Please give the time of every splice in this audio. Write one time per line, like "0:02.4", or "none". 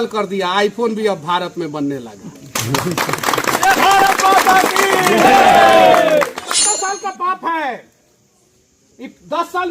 0:06.5